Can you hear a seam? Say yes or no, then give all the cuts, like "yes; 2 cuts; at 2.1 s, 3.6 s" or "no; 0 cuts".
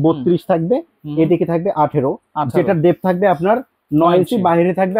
no; 0 cuts